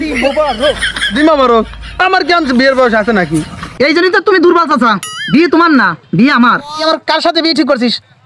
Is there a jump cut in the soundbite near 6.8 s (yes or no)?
yes